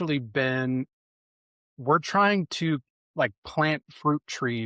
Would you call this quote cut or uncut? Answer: uncut